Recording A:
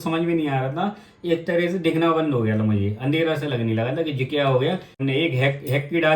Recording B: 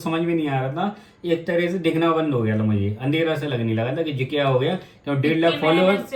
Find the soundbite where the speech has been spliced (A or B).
A